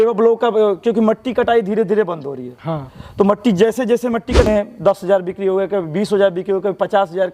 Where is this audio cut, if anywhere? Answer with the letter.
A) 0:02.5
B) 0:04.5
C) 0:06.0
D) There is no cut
B